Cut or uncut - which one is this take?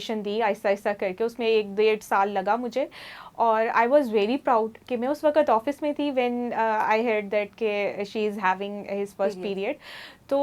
uncut